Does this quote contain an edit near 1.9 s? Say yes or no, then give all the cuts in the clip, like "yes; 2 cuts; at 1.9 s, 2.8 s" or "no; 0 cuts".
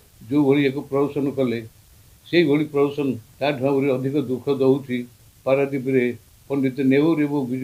no; 2 cuts; at 3.3 s, 6.3 s